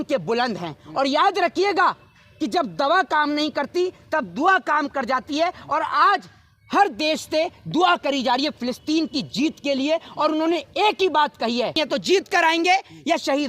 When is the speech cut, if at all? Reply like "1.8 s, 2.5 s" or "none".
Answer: 11.8 s

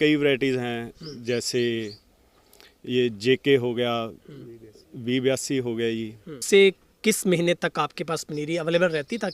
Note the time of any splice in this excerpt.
6.4 s

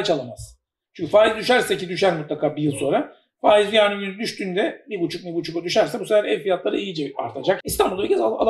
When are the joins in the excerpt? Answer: 7.6 s

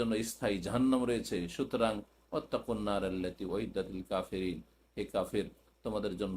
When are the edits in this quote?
none

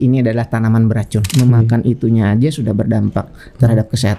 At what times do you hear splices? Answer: 1.3 s

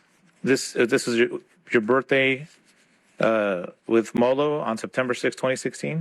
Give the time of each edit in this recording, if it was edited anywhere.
none

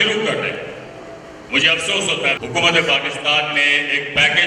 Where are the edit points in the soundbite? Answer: 2.4 s

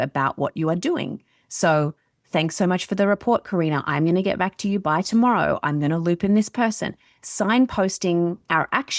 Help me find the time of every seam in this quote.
none

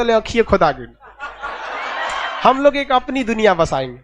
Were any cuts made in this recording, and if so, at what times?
2.2 s

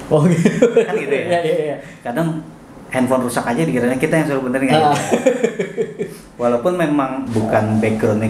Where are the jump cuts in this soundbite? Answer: 7.2 s

